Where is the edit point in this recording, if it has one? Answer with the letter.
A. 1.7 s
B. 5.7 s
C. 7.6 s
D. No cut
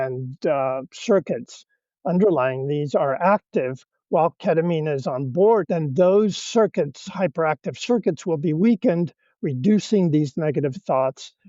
B